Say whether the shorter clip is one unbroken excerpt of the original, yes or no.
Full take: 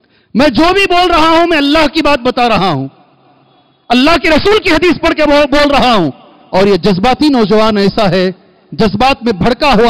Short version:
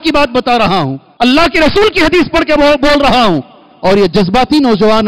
no